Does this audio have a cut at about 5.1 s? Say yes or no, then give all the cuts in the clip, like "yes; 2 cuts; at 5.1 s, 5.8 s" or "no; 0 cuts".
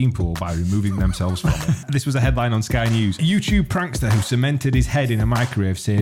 no; 2 cuts; at 1.8 s, 3.2 s